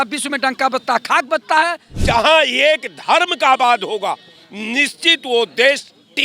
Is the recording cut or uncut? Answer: cut